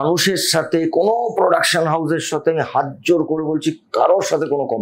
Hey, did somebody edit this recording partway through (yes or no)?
no